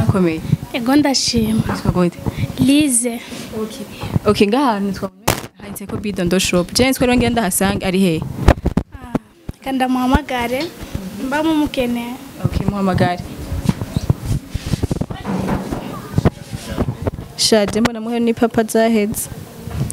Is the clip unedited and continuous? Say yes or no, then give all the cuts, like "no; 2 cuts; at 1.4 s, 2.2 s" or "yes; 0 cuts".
yes; 0 cuts